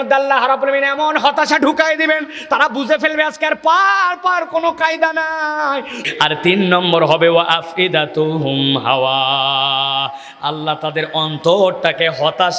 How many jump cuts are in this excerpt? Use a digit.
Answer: 1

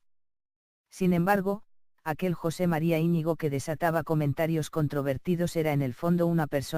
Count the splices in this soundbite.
1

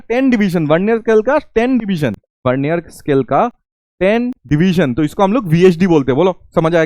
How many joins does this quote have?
2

